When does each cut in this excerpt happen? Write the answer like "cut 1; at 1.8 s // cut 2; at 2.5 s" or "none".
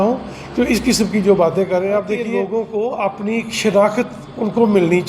cut 1; at 2.3 s

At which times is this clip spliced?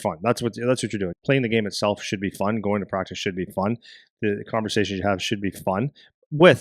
cut 1; at 1.2 s

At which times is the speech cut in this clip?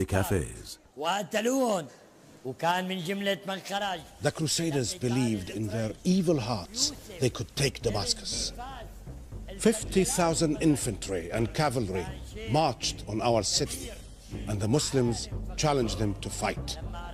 cut 1; at 7.8 s

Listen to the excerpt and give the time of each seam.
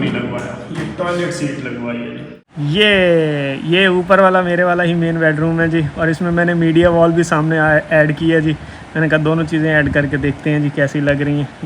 cut 1; at 2.4 s

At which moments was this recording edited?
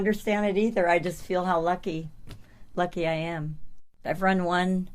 cut 1; at 4.0 s

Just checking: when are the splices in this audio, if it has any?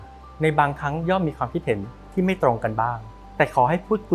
none

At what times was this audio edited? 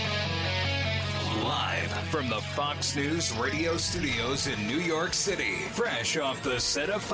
cut 1; at 1.2 s

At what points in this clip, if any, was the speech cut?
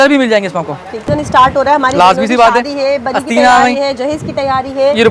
cut 1; at 1.0 s

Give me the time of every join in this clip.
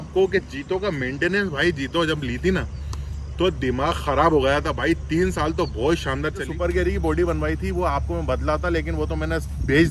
cut 1; at 6.4 s

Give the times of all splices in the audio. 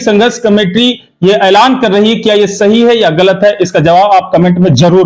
none

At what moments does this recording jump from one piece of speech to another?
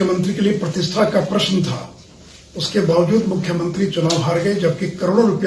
none

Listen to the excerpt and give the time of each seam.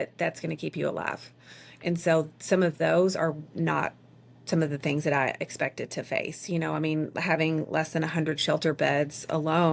none

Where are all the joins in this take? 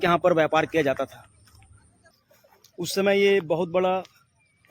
cut 1; at 2.2 s

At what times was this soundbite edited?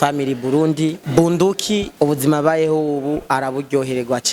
cut 1; at 1.0 s // cut 2; at 1.9 s

